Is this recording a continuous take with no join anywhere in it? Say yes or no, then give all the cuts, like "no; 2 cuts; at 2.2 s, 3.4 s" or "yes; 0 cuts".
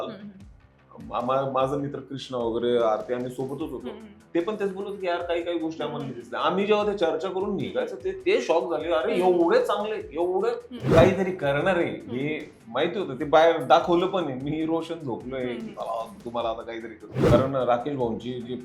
no; 2 cuts; at 10.8 s, 17.1 s